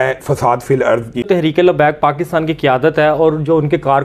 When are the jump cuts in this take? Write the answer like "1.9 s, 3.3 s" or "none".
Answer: 1.3 s